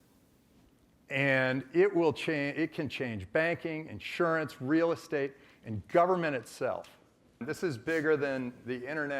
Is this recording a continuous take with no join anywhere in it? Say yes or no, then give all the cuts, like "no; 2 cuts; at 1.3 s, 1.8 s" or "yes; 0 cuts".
no; 1 cut; at 7.5 s